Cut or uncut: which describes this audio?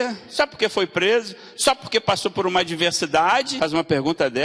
cut